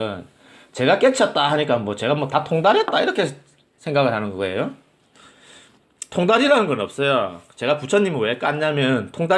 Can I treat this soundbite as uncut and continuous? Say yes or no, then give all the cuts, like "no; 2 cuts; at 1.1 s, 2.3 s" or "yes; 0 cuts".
no; 1 cut; at 2.5 s